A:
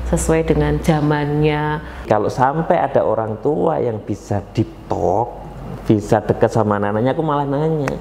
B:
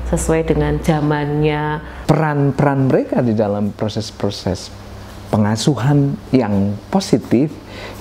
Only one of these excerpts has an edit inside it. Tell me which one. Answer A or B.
A